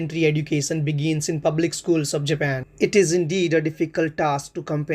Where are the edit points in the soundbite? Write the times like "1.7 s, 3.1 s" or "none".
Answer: 2.6 s